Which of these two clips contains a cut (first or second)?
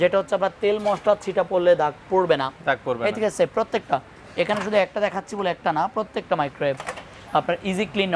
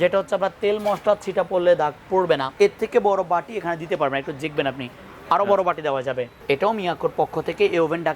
second